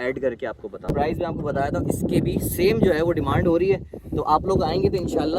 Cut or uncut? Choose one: cut